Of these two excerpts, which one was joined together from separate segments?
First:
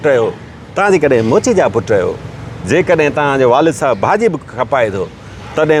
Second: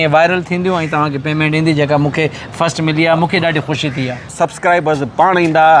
second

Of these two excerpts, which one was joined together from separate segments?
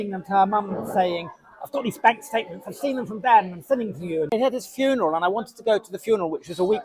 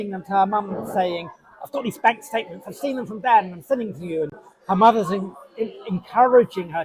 first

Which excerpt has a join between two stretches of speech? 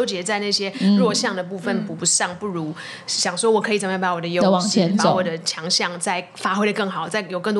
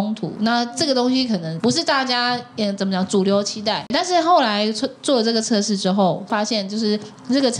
second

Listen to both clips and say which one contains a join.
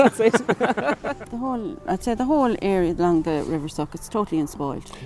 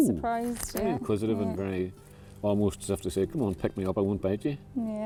first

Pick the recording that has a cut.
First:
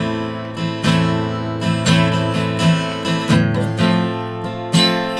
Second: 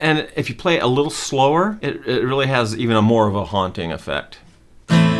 second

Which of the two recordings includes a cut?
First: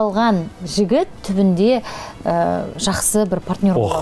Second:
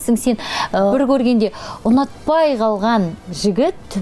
second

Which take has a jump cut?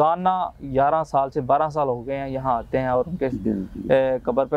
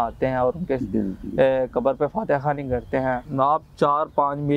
second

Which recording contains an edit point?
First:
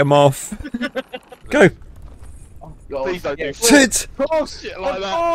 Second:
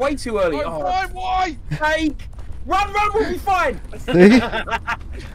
first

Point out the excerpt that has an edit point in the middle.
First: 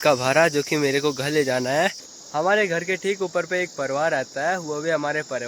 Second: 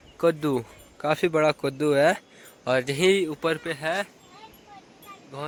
first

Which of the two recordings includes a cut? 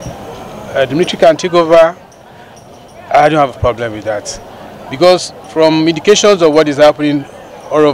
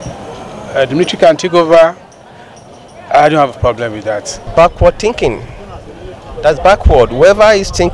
second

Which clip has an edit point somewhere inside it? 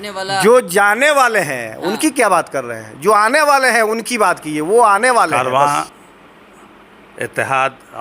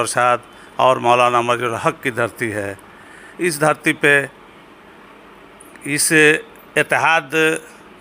first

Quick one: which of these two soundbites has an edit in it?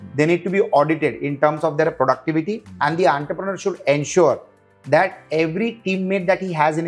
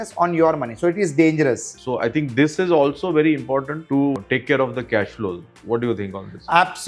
second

